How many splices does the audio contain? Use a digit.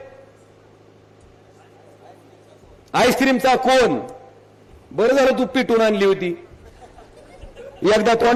0